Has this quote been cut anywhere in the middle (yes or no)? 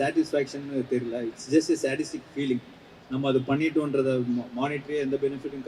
no